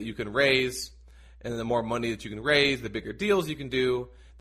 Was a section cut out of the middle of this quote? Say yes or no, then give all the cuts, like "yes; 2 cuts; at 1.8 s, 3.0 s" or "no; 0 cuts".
no; 0 cuts